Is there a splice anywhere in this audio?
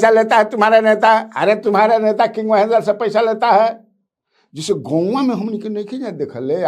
no; 0 cuts

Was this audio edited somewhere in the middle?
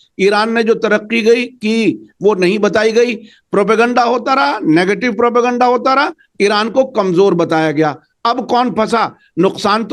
no; 0 cuts

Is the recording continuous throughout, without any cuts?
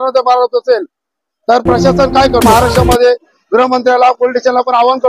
no; 1 cut; at 2.4 s

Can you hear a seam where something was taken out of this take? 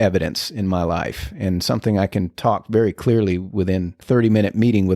yes; 1 cut; at 4.0 s

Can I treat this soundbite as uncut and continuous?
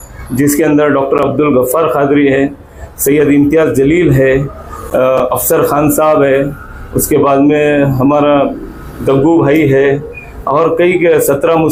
yes; 0 cuts

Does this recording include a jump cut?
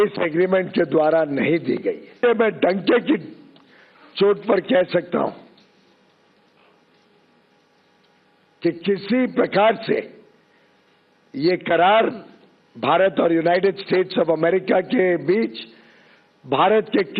yes; 1 cut; at 2.2 s

